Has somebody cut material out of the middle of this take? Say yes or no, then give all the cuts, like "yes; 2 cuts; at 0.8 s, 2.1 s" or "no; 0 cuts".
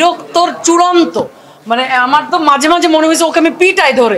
no; 0 cuts